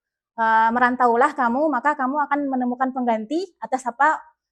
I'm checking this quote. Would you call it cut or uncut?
uncut